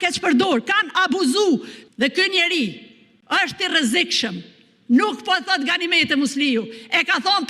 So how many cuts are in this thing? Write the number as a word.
one